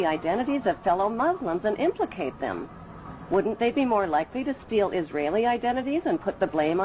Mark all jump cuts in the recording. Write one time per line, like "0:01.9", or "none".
none